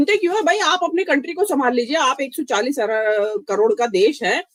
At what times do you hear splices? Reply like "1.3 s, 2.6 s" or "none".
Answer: none